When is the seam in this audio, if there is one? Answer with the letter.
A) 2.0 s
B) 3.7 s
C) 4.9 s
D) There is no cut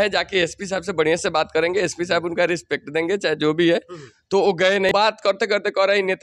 C